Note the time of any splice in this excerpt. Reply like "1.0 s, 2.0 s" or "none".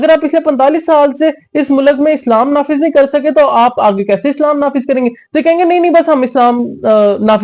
none